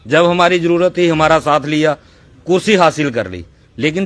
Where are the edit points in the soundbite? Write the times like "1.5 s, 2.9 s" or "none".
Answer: 1.7 s